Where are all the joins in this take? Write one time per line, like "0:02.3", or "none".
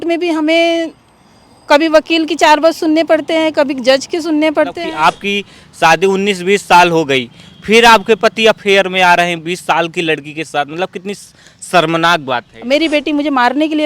0:04.8
0:12.5